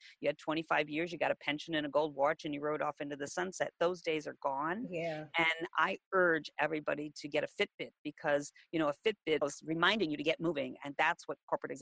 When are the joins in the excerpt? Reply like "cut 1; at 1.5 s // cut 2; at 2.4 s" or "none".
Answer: cut 1; at 9.4 s